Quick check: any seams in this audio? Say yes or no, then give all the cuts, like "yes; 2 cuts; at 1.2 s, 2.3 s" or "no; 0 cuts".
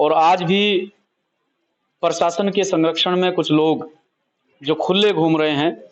no; 0 cuts